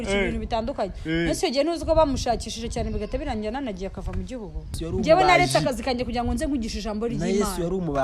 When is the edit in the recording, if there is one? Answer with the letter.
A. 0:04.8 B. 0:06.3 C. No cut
A